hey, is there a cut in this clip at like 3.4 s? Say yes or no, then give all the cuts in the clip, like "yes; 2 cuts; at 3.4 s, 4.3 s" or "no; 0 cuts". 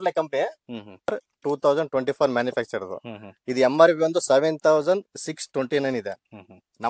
no; 1 cut; at 1.1 s